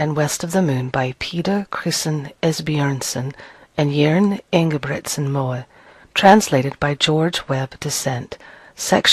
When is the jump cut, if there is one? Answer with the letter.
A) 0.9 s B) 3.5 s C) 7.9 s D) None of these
C